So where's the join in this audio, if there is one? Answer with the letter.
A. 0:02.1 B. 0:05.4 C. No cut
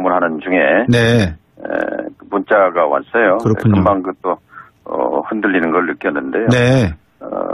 B